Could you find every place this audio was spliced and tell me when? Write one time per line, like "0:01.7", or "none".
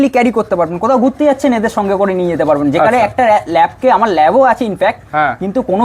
none